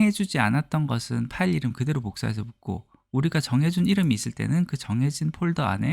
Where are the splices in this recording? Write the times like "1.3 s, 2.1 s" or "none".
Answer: none